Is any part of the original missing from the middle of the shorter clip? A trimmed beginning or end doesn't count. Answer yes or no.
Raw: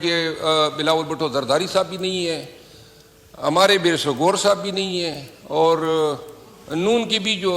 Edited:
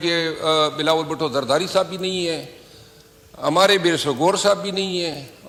no